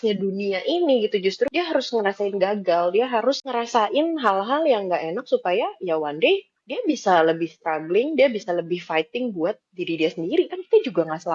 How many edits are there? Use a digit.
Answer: 2